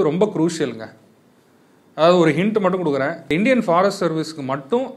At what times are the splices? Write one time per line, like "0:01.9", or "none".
0:03.2